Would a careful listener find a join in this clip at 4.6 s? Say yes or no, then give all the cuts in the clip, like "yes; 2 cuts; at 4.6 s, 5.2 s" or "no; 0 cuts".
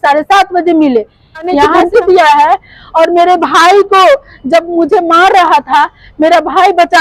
no; 1 cut; at 1.7 s